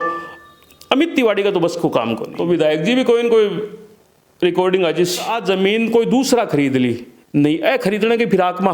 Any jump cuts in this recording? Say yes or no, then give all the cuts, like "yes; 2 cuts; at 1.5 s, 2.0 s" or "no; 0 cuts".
yes; 2 cuts; at 2.3 s, 5.3 s